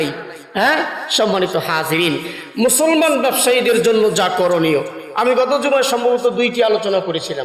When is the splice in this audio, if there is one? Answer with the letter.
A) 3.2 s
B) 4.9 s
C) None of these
C